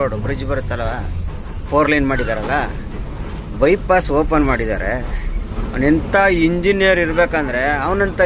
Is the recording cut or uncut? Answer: uncut